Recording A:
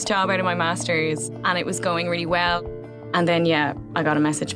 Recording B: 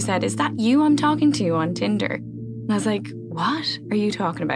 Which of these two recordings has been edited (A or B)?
A